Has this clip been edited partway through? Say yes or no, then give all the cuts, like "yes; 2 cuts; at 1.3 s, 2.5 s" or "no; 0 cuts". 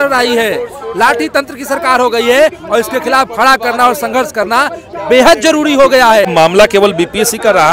yes; 1 cut; at 6.3 s